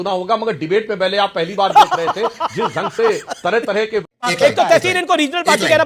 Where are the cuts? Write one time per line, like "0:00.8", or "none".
0:04.2